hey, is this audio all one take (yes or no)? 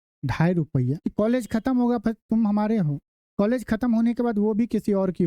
no